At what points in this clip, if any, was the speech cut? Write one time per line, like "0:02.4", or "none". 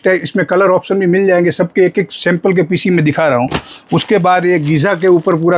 none